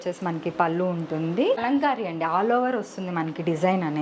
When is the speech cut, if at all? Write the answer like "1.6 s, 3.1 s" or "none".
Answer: 1.6 s